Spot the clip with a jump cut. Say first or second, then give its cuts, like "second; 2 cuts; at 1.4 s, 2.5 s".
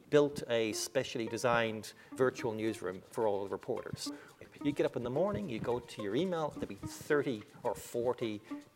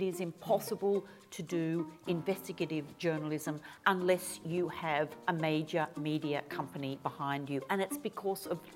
first; 2 cuts; at 2.1 s, 4.0 s